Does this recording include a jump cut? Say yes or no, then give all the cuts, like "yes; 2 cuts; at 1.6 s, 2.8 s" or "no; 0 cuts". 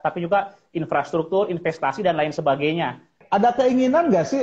yes; 1 cut; at 3.2 s